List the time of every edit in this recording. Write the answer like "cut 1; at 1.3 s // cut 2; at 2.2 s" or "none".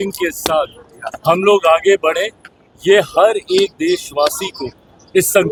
none